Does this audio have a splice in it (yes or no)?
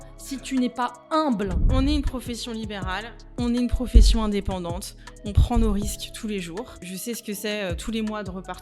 yes